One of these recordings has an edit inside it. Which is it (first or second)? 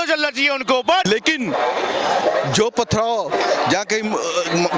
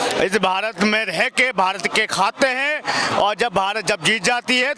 first